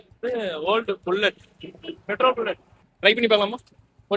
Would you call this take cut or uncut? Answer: uncut